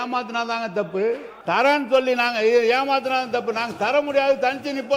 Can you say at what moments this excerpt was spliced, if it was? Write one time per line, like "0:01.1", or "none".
0:01.3